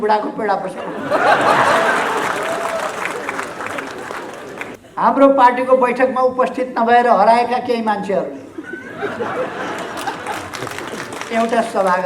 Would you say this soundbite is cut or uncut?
cut